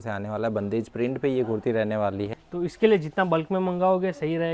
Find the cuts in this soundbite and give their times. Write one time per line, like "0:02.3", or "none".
0:02.4